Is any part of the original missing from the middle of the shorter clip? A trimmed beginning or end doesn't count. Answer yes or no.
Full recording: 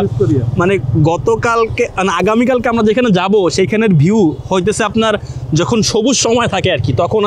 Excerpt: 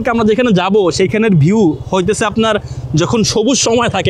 no